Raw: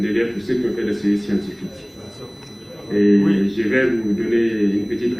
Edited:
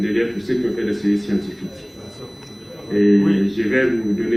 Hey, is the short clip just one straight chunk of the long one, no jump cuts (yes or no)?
yes